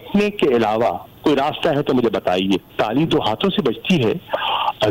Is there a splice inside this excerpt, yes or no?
yes